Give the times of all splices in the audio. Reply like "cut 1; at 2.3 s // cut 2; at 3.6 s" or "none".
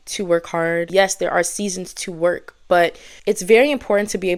none